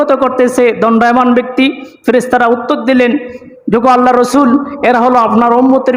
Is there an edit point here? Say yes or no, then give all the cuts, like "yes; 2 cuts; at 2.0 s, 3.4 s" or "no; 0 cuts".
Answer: no; 0 cuts